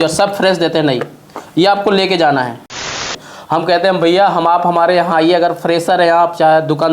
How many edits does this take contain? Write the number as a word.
one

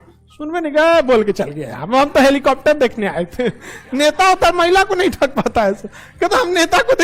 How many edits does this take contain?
zero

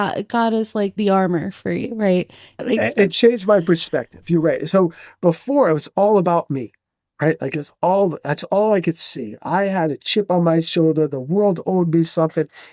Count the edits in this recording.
two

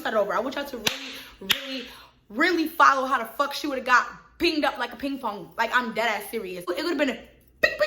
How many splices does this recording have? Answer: one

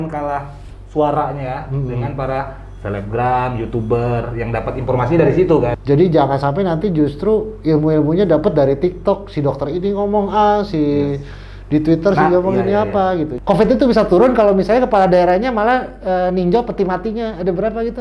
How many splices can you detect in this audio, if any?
two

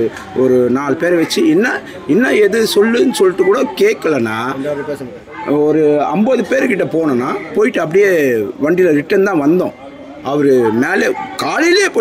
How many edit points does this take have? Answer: zero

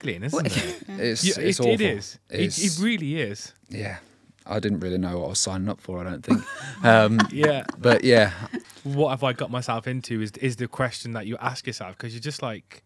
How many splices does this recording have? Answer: zero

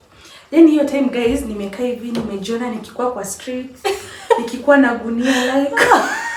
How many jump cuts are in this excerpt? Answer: zero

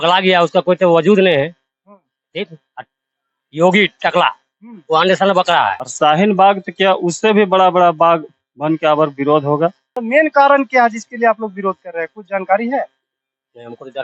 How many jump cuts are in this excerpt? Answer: two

